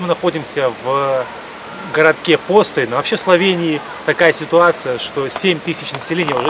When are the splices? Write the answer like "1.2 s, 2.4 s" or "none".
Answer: none